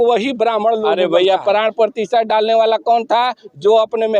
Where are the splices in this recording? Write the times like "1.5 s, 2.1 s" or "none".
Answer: 0.9 s